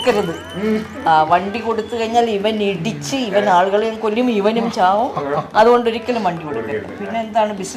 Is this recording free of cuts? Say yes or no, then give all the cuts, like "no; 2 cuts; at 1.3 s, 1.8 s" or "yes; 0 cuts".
yes; 0 cuts